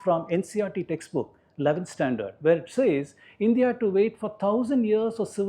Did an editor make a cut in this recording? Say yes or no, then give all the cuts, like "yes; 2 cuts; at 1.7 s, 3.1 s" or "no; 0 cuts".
no; 0 cuts